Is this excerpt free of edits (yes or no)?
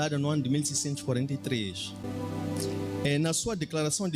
no